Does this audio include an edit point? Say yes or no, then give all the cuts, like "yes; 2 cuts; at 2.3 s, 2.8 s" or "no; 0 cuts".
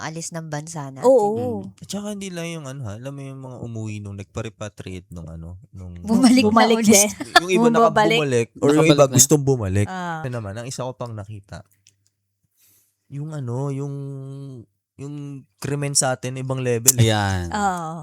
no; 0 cuts